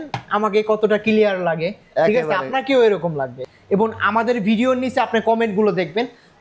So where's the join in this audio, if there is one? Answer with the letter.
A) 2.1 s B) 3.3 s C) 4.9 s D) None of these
B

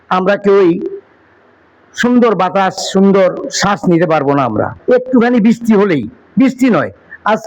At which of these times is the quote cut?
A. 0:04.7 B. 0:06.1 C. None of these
A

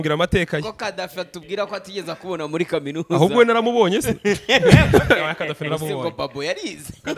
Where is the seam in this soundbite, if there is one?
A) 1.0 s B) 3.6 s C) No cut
C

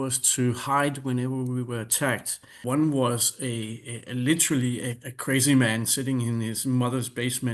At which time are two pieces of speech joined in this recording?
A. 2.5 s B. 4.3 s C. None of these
A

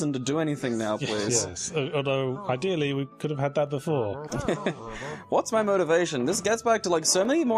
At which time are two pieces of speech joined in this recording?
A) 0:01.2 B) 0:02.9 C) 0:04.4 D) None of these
D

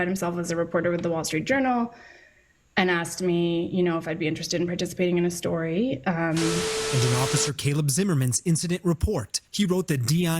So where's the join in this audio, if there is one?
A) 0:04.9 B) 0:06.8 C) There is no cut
B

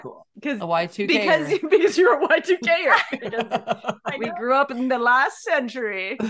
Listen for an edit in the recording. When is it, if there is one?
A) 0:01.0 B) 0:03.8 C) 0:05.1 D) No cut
D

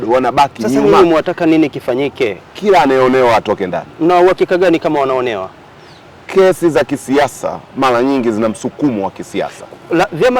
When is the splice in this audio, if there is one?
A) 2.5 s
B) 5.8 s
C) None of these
A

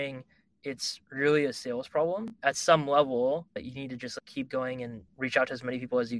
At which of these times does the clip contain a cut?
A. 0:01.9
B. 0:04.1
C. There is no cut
B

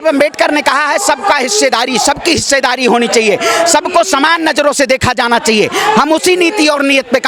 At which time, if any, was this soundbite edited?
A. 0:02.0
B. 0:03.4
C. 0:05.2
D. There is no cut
D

